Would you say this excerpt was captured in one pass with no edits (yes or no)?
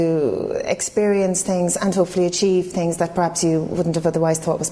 yes